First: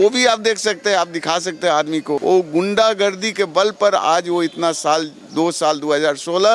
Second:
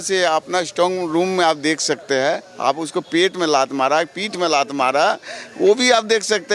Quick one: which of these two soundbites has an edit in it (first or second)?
first